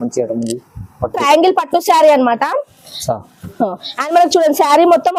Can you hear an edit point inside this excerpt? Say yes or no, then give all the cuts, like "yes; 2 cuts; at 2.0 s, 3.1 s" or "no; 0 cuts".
yes; 1 cut; at 1.2 s